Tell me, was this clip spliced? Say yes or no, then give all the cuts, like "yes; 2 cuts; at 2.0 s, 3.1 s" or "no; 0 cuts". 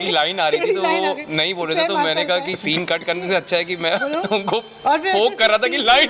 no; 0 cuts